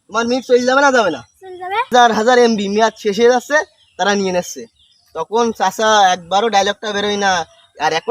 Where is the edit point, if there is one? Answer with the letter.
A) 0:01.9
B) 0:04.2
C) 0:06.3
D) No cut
A